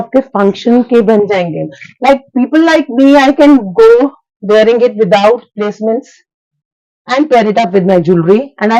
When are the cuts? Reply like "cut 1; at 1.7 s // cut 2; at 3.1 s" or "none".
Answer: none